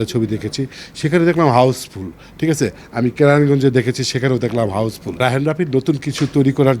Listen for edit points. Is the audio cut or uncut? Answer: cut